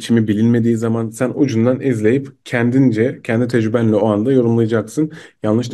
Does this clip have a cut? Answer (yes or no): no